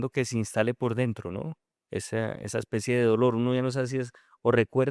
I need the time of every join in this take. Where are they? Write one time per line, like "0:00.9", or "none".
none